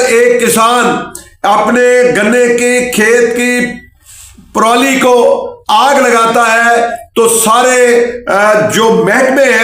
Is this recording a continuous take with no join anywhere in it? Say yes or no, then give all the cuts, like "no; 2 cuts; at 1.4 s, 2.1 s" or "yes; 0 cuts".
yes; 0 cuts